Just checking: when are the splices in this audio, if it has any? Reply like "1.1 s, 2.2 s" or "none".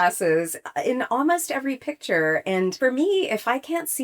2.8 s